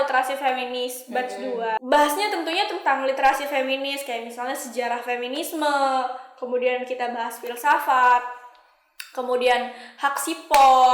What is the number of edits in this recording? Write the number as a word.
one